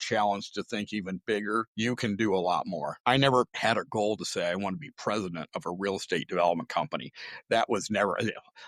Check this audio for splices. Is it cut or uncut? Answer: cut